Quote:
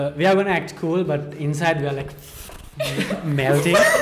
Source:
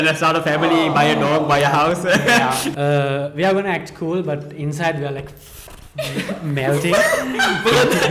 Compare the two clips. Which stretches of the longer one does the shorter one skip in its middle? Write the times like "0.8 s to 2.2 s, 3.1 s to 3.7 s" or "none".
none